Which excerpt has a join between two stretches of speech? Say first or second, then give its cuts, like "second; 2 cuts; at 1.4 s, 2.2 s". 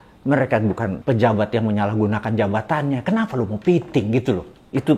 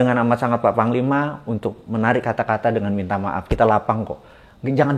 first; 1 cut; at 1.0 s